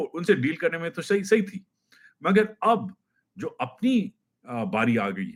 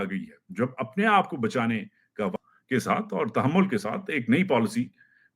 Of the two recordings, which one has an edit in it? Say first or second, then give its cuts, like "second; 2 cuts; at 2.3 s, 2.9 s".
second; 1 cut; at 2.5 s